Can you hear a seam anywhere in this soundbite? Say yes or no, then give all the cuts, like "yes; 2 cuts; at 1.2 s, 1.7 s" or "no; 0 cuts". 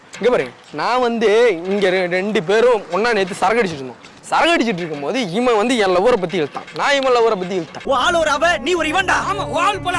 no; 0 cuts